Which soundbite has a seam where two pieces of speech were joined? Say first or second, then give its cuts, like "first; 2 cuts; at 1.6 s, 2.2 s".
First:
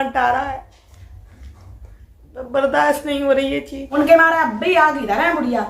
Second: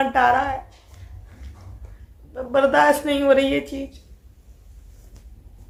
first; 1 cut; at 3.8 s